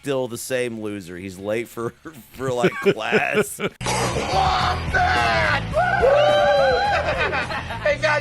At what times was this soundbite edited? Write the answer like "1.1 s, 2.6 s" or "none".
3.8 s